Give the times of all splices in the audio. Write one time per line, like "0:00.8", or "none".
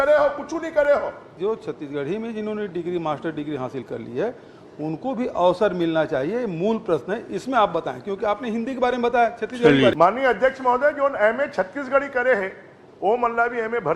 0:01.3
0:09.9